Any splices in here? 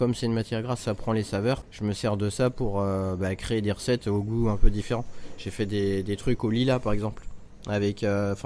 yes; 1 cut; at 1.7 s

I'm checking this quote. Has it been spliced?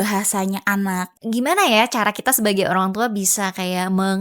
yes; 1 cut; at 1.1 s

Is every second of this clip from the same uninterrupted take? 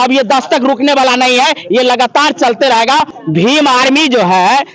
no; 1 cut; at 3.1 s

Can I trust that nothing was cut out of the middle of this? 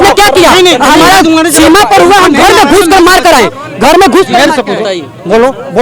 yes; 0 cuts

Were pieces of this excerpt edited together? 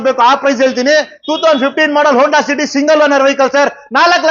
no; 0 cuts

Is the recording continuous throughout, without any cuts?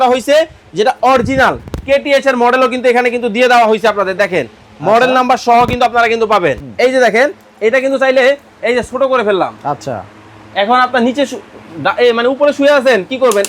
no; 1 cut; at 6.6 s

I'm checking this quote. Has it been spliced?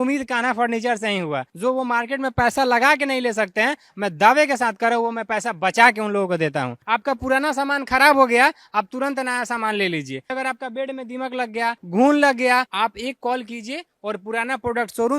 yes; 5 cuts; at 1.5 s, 6.7 s, 10.3 s, 11.8 s, 12.7 s

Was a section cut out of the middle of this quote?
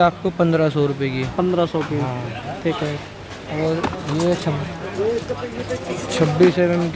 no; 0 cuts

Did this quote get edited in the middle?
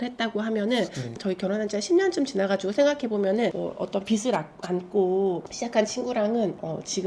yes; 2 cuts; at 1.2 s, 3.6 s

